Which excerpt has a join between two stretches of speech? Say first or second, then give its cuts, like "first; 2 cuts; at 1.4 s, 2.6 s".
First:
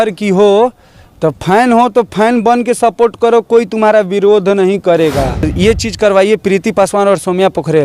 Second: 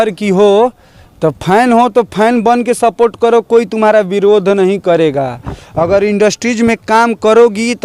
first; 1 cut; at 5.5 s